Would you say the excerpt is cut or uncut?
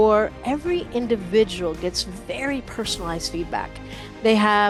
uncut